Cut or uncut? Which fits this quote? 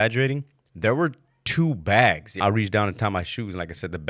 cut